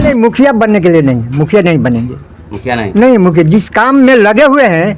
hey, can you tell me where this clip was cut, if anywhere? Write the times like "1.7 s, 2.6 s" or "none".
none